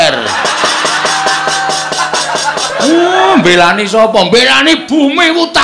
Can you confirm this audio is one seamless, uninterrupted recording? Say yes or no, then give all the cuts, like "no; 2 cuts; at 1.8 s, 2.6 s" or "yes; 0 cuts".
no; 1 cut; at 3.5 s